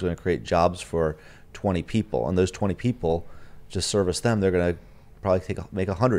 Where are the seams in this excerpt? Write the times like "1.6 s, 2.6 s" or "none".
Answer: none